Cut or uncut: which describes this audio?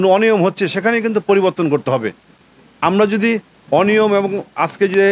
uncut